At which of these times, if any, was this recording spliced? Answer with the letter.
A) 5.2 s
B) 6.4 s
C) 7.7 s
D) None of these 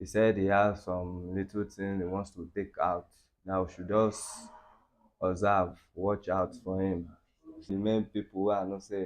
C